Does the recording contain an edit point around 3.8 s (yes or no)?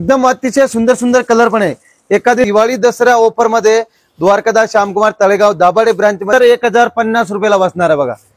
no